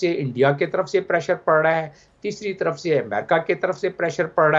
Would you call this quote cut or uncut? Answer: uncut